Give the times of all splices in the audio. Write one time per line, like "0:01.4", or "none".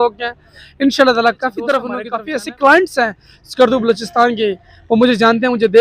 0:02.0